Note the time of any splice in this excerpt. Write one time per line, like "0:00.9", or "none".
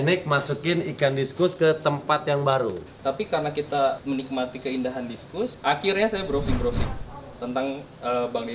0:02.9
0:04.0
0:05.5